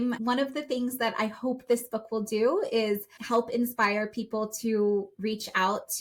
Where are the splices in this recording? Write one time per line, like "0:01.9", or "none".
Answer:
0:03.1

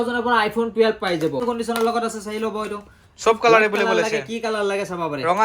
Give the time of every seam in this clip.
0:01.4

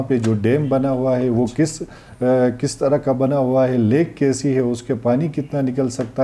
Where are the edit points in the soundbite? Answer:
none

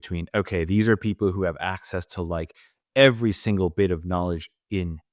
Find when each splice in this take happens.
none

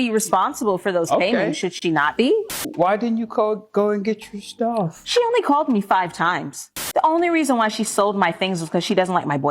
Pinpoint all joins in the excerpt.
0:02.5
0:06.8

